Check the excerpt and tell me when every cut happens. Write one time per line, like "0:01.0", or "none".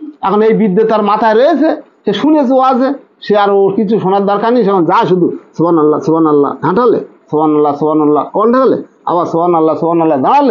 none